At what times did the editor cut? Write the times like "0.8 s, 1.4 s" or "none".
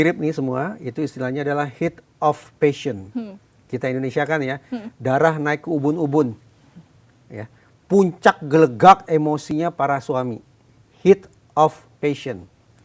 none